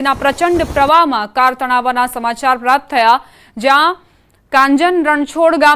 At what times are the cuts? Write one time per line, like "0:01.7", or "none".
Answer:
0:02.1